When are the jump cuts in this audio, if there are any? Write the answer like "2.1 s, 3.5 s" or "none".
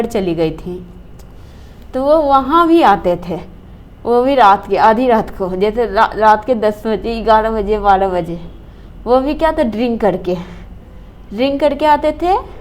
none